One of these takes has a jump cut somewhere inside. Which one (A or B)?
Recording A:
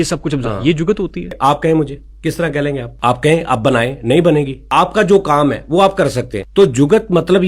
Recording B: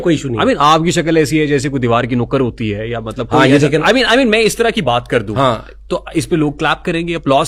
A